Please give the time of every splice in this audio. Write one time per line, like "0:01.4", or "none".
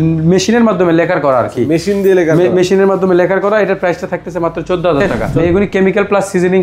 0:05.2